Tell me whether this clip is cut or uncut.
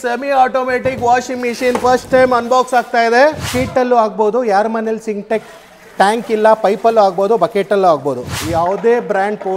cut